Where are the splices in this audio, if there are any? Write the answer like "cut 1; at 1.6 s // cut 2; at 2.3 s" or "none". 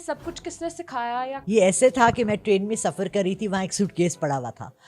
cut 1; at 1.4 s